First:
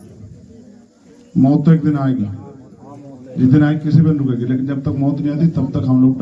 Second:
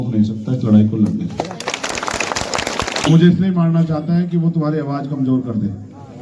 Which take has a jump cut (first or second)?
second